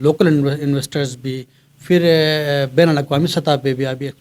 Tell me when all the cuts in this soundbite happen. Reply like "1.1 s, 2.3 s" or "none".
none